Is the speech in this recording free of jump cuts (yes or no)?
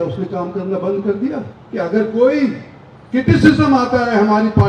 no